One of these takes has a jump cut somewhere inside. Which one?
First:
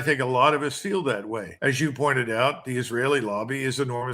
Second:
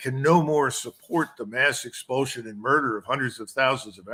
first; 1 cut; at 1.4 s

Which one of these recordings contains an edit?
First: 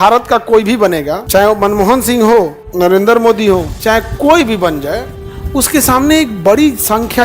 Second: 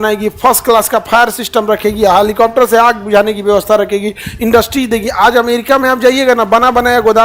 first; 3 cuts; at 1.2 s, 2.6 s, 3.7 s

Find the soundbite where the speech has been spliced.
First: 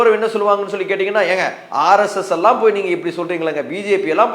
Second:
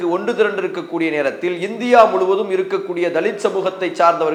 first; 1 cut; at 1.6 s

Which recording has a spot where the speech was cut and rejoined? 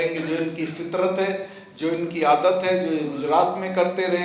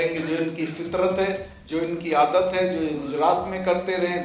second; 1 cut; at 1.5 s

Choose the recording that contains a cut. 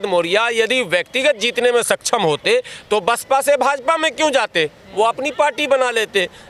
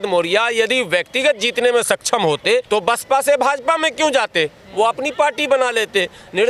second; 1 cut; at 2.6 s

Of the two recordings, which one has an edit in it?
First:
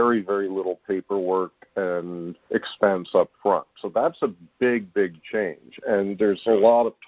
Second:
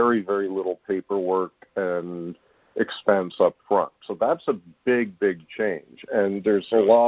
first; 1 cut; at 2.3 s

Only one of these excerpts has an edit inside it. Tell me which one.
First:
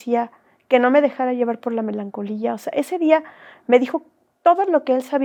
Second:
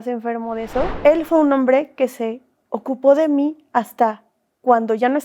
second; 1 cut; at 0.9 s

